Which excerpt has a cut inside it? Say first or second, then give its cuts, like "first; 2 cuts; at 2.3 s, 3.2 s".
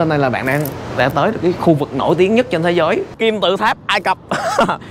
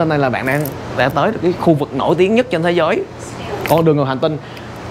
first; 1 cut; at 3.1 s